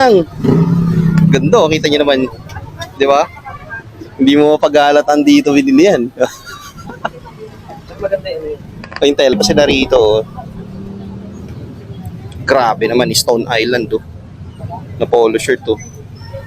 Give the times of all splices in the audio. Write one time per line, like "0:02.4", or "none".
0:09.3